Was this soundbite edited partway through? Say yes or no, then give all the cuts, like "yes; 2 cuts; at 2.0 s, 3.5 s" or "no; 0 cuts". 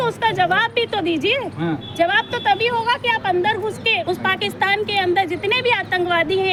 no; 0 cuts